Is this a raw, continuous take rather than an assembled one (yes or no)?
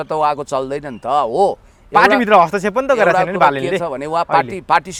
yes